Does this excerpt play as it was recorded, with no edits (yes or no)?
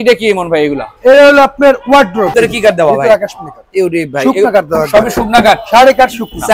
no